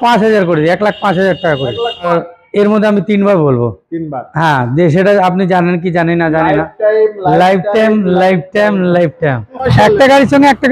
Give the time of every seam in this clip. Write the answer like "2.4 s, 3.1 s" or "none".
2.1 s, 9.7 s